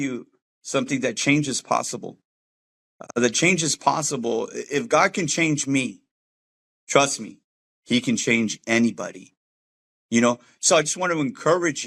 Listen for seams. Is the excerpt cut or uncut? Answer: uncut